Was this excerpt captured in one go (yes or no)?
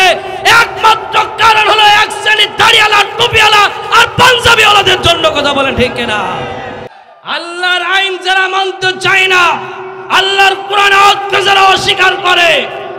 no